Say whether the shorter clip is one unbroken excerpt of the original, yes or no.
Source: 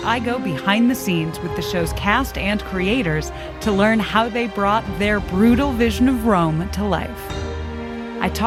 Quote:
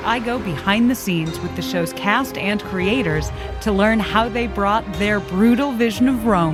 yes